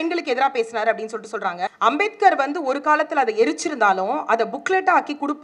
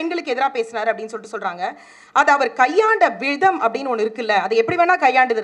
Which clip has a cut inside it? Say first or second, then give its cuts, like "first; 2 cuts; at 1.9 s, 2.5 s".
first; 1 cut; at 1.7 s